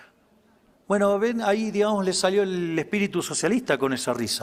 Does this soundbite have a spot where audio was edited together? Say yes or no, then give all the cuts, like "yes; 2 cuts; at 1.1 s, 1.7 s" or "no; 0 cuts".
no; 0 cuts